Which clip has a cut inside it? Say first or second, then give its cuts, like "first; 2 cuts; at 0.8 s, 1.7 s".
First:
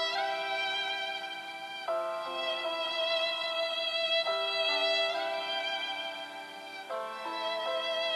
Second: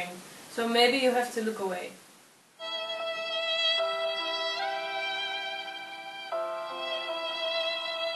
second; 1 cut; at 2.6 s